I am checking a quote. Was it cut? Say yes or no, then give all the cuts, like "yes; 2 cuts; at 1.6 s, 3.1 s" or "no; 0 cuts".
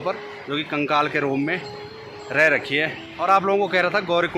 no; 0 cuts